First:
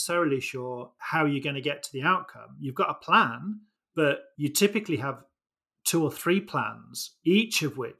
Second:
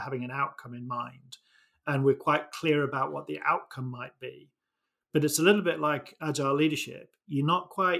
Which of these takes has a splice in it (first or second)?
first